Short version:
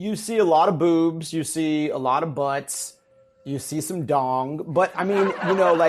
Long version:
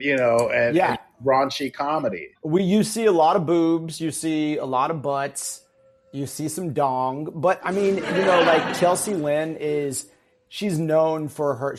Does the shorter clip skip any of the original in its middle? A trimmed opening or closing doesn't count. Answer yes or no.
no